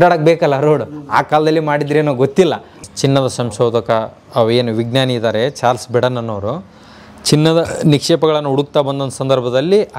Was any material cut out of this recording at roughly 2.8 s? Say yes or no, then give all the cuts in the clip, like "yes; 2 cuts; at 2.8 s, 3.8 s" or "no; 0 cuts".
yes; 1 cut; at 2.8 s